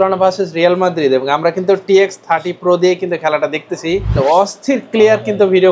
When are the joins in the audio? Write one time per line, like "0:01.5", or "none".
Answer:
0:04.2

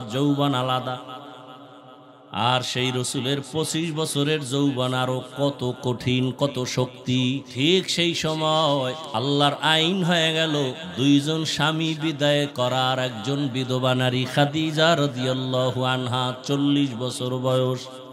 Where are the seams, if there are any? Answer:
0:07.5
0:09.0
0:10.8

